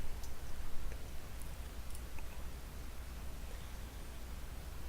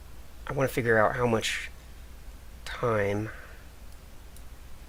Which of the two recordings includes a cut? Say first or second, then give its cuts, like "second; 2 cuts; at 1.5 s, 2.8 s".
first; 1 cut; at 3.7 s